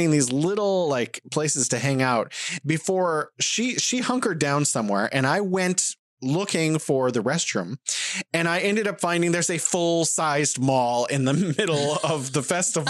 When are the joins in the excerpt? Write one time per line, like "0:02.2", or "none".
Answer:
none